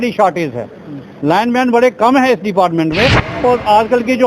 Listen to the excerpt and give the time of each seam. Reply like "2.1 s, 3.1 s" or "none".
3.3 s